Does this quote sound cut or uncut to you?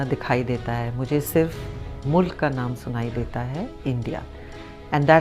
uncut